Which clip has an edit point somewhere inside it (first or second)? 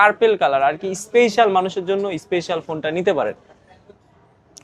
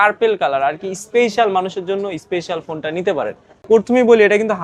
second